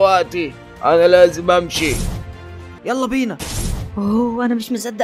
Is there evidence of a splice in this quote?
yes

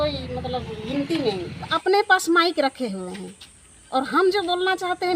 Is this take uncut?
no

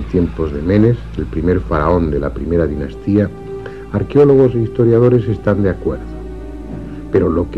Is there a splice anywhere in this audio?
no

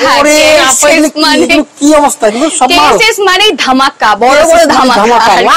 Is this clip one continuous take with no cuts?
yes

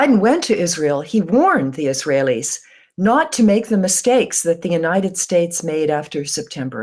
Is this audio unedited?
yes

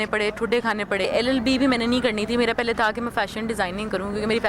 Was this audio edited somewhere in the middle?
yes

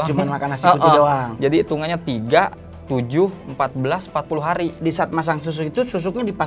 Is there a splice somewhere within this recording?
yes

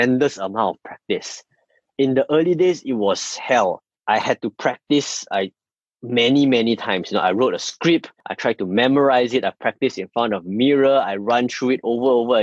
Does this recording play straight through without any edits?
yes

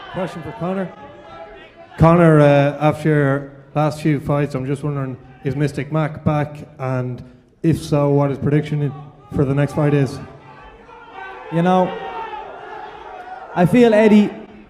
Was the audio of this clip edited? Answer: no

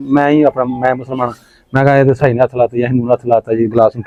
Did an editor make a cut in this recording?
no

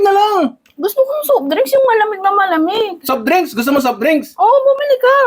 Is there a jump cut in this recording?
no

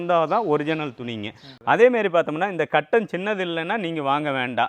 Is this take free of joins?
no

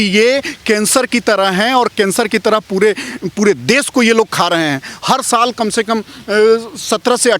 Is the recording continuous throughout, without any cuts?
yes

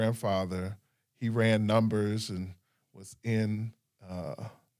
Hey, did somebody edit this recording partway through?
no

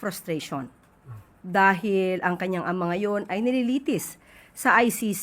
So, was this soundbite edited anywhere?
no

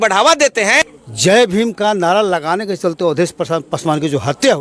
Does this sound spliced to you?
yes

